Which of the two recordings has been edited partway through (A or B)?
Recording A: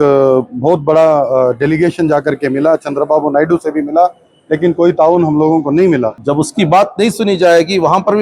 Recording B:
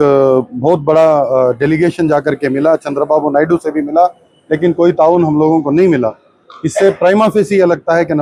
A